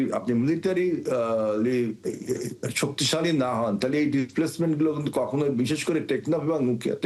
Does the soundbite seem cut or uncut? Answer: uncut